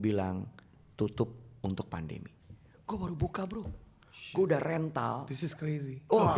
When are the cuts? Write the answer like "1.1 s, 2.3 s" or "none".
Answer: none